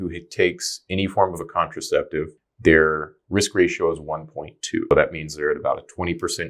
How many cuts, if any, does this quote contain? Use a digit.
2